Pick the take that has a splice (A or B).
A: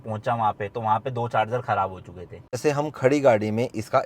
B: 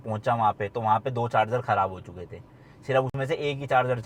A